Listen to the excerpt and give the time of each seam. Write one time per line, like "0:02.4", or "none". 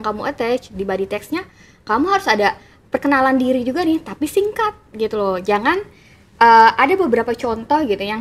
none